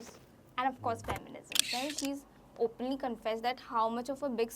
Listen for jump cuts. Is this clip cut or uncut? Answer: cut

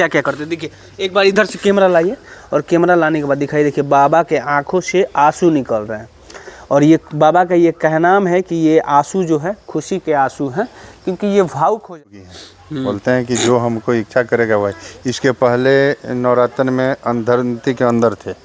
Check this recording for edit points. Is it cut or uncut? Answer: cut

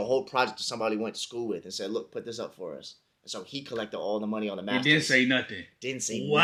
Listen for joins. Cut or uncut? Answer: uncut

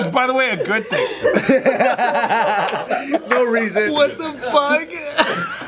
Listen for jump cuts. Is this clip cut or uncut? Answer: cut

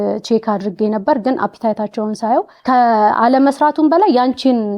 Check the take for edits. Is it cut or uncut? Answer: cut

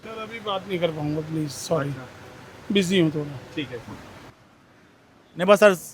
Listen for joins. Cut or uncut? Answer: uncut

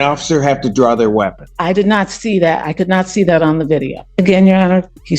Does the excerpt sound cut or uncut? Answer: cut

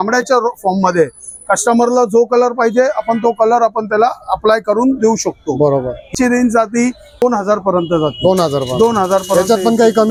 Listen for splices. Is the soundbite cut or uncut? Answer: uncut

